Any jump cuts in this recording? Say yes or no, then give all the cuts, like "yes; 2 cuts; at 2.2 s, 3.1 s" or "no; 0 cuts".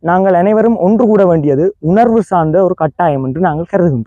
no; 0 cuts